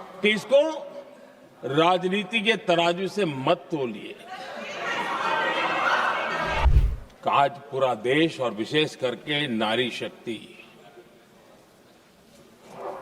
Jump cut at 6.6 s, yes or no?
yes